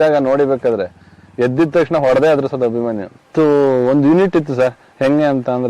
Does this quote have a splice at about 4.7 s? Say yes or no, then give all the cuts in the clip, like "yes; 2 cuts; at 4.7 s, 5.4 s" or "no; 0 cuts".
no; 1 cut; at 3.1 s